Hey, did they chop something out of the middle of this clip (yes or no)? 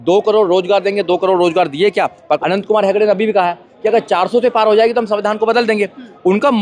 yes